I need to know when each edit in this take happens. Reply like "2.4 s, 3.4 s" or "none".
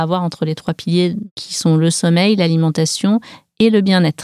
1.2 s